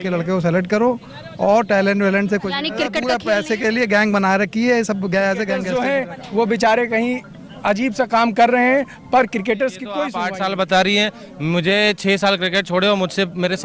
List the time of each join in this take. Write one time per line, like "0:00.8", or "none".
0:03.0
0:05.6
0:10.2

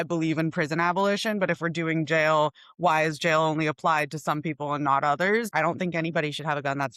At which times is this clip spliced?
0:05.5

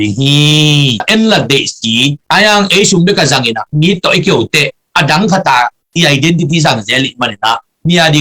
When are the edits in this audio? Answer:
0:01.0

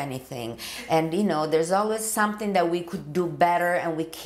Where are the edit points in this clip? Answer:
none

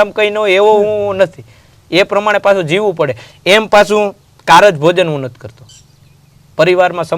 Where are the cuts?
none

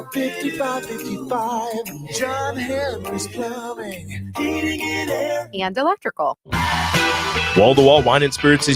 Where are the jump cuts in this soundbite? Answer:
0:06.4

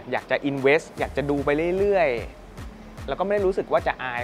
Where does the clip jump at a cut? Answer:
0:00.9

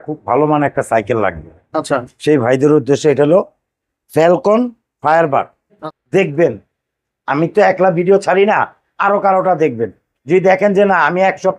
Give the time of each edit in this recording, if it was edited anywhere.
0:05.9

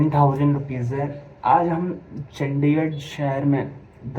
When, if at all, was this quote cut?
none

